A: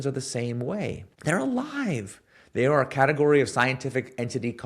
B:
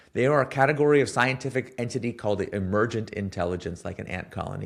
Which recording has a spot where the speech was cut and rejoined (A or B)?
A